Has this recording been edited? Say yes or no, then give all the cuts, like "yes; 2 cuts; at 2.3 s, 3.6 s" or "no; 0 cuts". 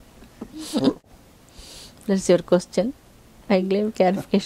yes; 1 cut; at 1.0 s